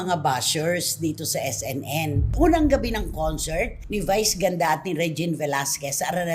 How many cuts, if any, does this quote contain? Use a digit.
1